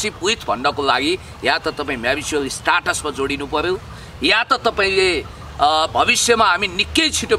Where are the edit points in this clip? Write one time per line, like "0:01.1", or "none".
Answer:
none